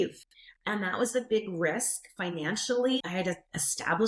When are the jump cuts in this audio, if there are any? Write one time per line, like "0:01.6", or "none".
0:03.0